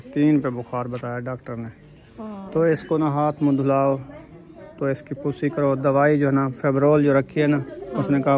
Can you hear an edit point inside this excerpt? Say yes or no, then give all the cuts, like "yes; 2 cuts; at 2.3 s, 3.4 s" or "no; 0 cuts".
no; 0 cuts